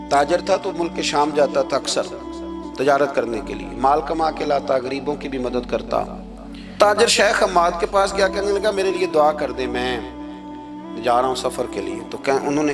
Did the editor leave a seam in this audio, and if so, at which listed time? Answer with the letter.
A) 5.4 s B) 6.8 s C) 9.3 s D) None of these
B